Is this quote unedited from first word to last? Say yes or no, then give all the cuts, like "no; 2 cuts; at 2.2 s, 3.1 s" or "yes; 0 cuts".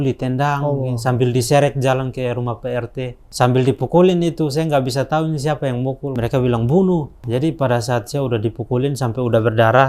no; 3 cuts; at 3.2 s, 6.1 s, 7.2 s